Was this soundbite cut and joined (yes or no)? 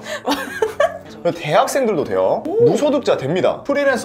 yes